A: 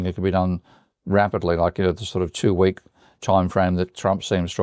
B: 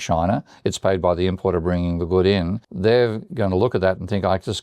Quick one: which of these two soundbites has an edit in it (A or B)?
B